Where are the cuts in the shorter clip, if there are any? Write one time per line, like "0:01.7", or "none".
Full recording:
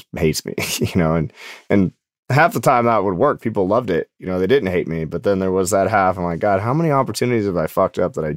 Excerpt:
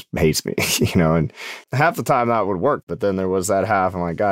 0:01.5
0:02.9